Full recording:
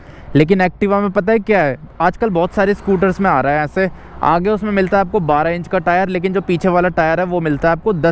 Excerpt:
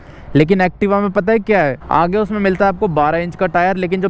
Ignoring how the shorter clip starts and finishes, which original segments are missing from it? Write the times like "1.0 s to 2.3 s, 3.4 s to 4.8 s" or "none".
1.8 s to 4.1 s